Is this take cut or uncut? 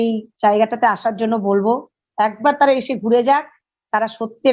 uncut